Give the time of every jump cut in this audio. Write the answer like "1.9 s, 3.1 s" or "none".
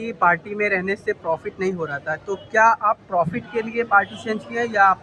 none